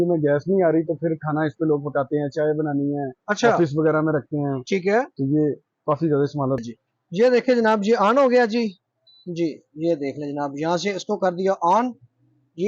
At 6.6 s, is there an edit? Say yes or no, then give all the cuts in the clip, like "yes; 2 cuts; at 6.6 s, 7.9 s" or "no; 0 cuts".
yes; 1 cut; at 6.6 s